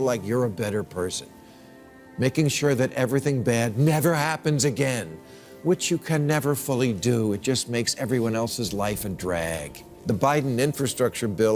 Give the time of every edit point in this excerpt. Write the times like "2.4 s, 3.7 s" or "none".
9.7 s